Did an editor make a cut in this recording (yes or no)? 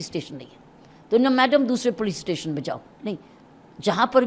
no